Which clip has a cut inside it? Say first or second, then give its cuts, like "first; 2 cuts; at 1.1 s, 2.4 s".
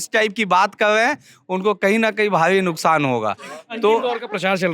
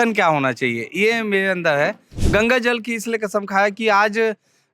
second; 1 cut; at 2.4 s